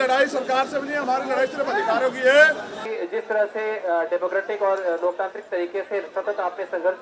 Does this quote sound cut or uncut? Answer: uncut